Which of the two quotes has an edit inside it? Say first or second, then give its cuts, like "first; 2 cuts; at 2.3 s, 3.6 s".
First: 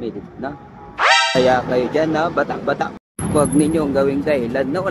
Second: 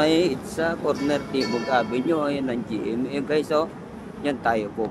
first; 1 cut; at 3.0 s